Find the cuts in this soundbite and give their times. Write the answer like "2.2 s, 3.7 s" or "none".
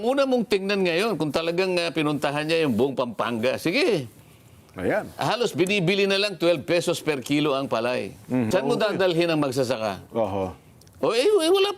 8.5 s